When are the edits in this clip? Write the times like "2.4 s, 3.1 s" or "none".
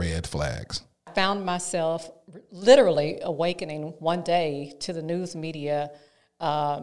1.1 s